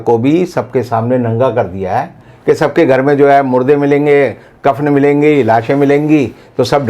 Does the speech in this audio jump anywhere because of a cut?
yes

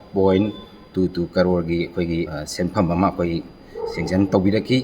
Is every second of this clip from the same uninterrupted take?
no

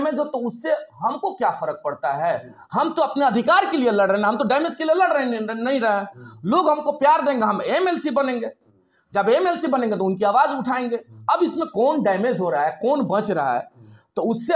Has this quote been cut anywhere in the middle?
no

